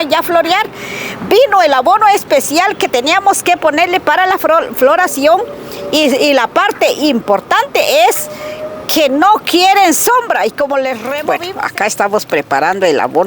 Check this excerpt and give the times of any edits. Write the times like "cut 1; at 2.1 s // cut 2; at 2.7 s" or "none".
cut 1; at 11.1 s